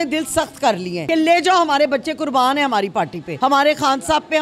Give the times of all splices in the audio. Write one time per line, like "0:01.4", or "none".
0:00.9
0:03.2